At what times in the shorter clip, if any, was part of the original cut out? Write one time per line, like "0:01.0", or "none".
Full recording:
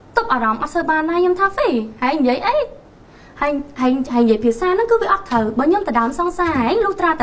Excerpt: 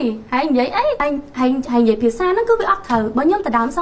0:01.0